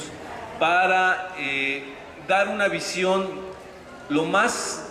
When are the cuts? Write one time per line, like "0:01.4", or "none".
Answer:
none